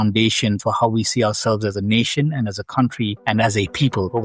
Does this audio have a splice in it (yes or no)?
yes